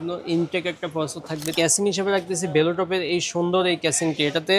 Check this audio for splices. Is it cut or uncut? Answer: cut